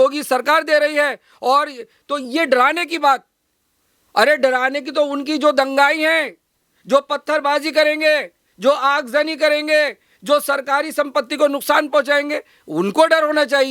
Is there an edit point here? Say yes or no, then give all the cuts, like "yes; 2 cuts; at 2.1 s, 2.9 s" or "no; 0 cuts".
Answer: no; 0 cuts